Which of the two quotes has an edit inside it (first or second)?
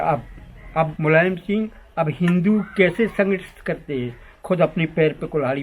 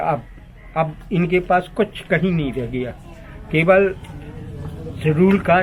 first